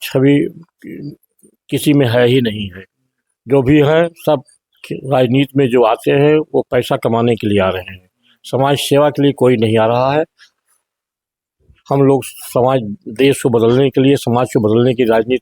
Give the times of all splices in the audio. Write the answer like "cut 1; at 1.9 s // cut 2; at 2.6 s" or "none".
none